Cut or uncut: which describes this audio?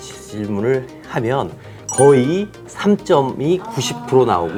uncut